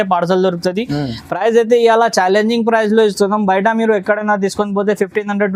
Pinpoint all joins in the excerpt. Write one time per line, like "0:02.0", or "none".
none

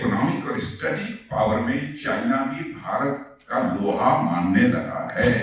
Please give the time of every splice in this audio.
none

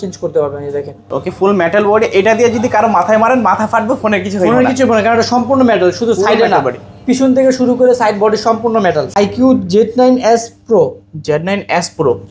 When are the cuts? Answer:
0:01.0
0:09.1

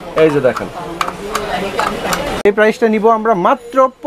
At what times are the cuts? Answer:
0:02.4

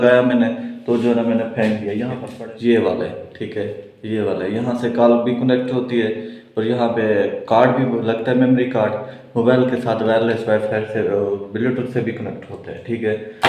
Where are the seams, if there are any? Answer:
none

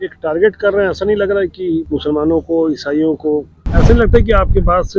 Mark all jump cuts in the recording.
0:01.9
0:03.7

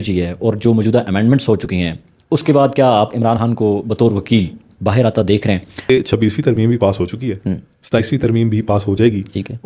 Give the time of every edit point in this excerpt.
0:05.9

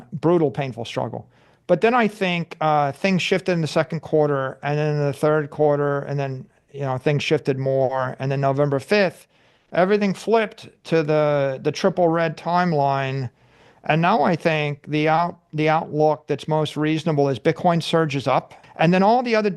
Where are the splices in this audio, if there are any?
0:18.6

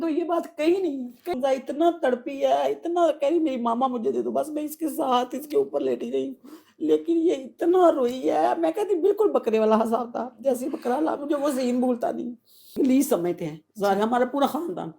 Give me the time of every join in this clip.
0:01.3
0:12.7

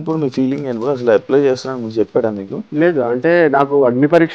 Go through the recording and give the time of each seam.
0:02.6

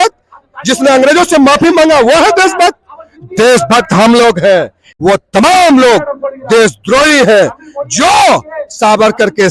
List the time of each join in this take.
0:04.8

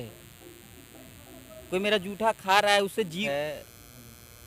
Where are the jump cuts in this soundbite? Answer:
0:03.2

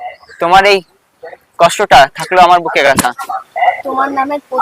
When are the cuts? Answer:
0:02.9

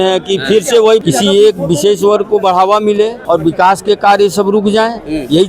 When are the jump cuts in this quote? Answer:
0:03.2

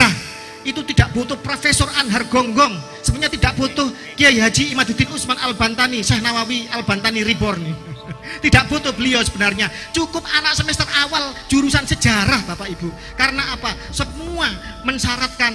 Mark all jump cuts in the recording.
none

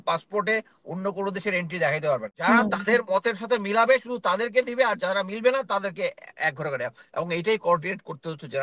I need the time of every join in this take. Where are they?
0:02.3

